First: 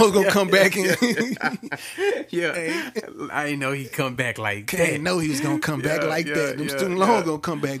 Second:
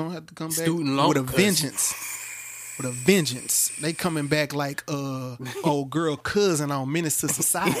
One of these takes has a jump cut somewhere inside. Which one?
second; 1 cut; at 5.5 s

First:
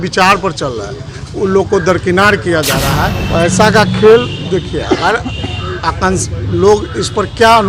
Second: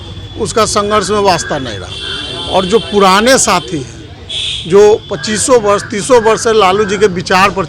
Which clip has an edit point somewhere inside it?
first; 1 cut; at 3.2 s

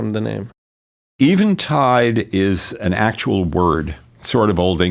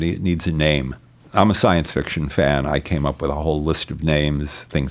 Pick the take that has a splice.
second; 1 cut; at 1.1 s

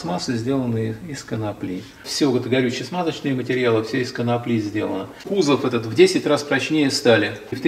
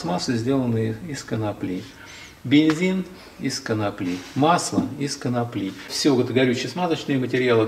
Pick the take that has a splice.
first; 2 cuts; at 2.0 s, 5.1 s

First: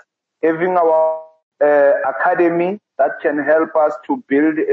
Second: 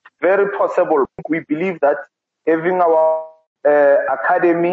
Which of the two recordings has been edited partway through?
second; 1 cut; at 1.1 s

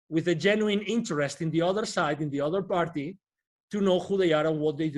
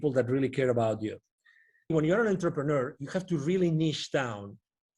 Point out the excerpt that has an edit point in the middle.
second; 1 cut; at 1.9 s

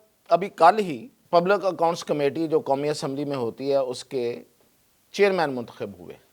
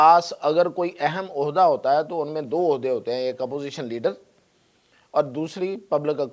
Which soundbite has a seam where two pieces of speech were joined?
first; 1 cut; at 1.1 s

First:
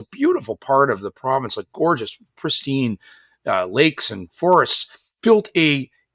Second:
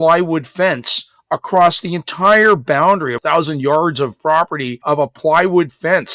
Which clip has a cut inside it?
second; 2 cuts; at 3.2 s, 4.8 s

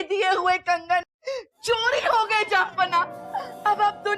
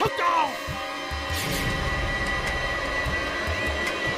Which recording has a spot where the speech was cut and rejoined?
first; 1 cut; at 1.0 s

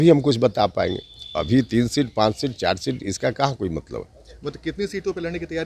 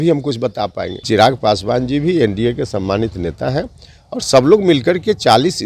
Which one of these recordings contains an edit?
second; 1 cut; at 1.0 s

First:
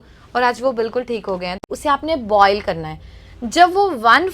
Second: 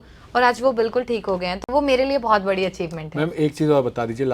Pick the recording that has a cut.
first; 1 cut; at 1.6 s

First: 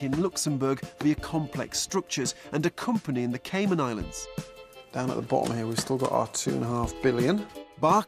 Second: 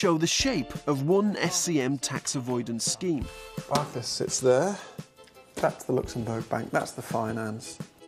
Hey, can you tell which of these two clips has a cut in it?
first; 1 cut; at 4.8 s

